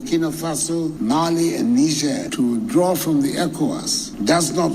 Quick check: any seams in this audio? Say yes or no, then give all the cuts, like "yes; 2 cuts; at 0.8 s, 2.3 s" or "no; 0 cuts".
yes; 2 cuts; at 0.9 s, 2.3 s